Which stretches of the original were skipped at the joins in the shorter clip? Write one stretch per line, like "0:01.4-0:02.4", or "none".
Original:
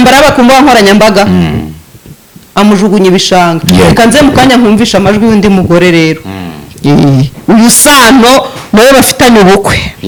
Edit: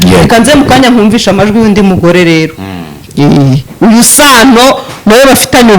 none